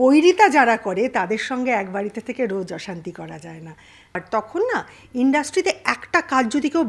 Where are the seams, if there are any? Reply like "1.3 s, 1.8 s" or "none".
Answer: 4.2 s